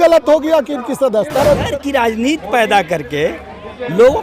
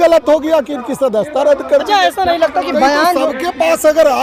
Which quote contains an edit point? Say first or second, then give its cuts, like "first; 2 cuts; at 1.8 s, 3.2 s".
first; 1 cut; at 1.7 s